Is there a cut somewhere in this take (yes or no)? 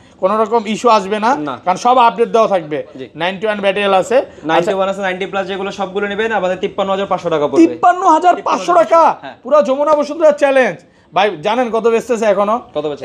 no